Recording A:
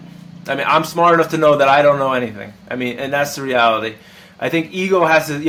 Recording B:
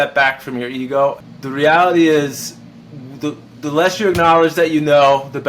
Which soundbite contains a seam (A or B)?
B